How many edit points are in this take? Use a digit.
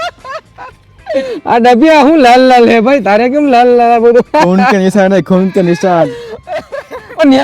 0